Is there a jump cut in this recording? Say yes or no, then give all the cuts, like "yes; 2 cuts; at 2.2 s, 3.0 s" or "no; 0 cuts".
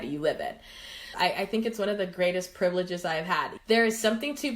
yes; 2 cuts; at 1.0 s, 3.5 s